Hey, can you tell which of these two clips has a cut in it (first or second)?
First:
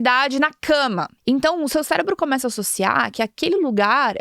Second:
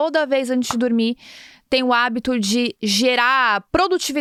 first